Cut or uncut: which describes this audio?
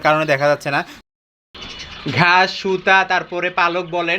cut